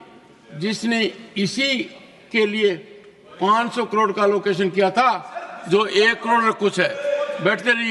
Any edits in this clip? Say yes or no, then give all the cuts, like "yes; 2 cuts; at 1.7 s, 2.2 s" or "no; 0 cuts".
no; 0 cuts